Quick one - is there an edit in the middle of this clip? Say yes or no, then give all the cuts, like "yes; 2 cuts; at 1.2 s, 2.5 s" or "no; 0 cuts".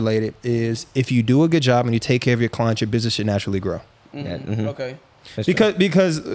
no; 0 cuts